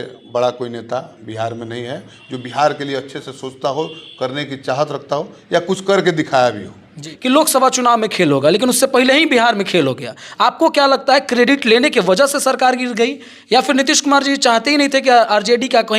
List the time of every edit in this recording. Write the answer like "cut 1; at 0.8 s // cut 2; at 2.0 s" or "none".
cut 1; at 7.1 s